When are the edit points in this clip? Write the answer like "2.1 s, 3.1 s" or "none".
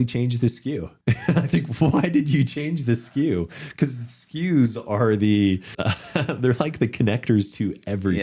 0.9 s, 5.7 s